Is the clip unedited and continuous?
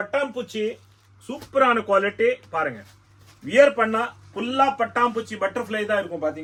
yes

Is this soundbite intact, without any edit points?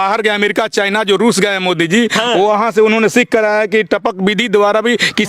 yes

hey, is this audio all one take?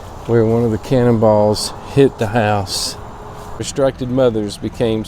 no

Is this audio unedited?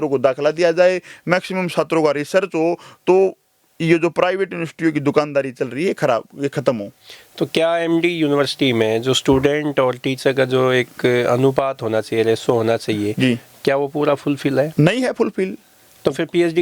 yes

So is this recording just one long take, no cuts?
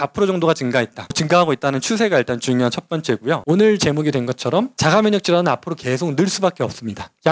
no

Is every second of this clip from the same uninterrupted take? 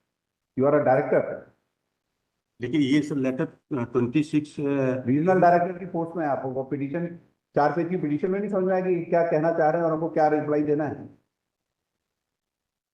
yes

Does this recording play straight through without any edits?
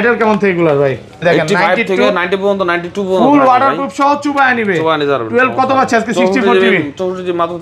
no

